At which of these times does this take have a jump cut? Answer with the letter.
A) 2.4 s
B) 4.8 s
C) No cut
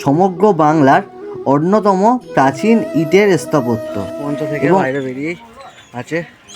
B